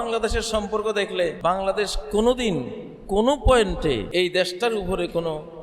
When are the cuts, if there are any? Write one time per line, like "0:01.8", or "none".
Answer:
0:01.4
0:04.0

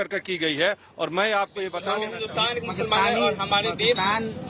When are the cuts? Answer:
0:01.9

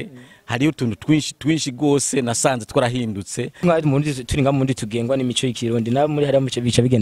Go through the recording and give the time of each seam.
0:03.5

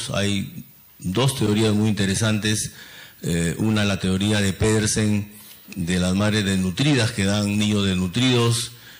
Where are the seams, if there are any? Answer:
0:03.4

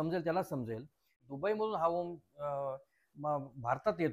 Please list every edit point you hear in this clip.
0:01.1

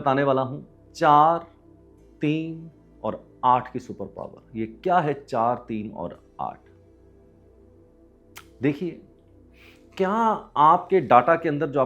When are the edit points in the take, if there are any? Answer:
none

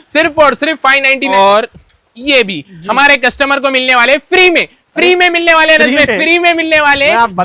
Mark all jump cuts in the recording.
0:01.3

